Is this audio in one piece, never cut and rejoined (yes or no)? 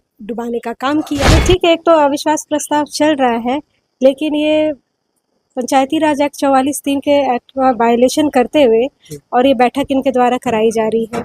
no